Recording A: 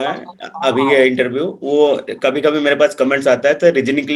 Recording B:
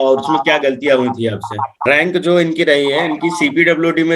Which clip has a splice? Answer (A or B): B